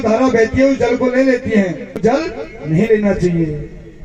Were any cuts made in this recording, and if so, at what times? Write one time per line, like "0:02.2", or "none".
0:02.0